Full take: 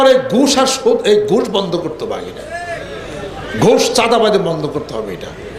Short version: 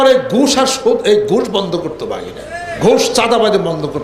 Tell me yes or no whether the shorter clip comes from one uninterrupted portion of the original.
no